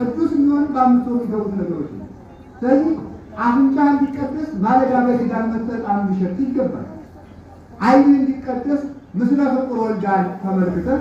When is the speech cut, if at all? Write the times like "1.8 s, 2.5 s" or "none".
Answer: none